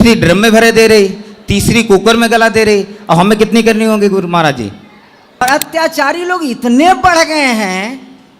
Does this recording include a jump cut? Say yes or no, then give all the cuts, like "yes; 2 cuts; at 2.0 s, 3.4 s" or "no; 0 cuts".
yes; 1 cut; at 5.4 s